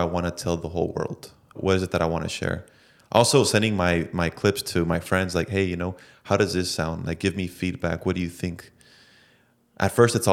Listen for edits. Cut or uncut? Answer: cut